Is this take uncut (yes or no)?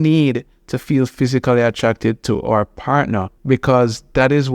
no